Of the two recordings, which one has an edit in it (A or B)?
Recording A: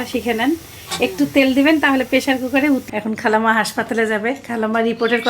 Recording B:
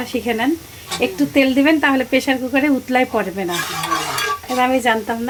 A